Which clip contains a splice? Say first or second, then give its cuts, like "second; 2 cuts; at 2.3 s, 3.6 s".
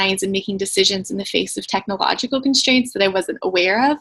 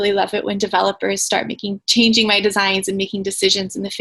second; 1 cut; at 1.8 s